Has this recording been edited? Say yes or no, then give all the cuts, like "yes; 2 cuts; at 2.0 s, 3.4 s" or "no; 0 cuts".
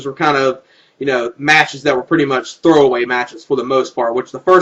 yes; 1 cut; at 1.3 s